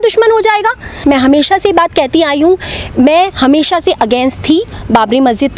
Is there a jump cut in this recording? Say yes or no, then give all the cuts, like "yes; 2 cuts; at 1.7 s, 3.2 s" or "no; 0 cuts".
yes; 1 cut; at 1.0 s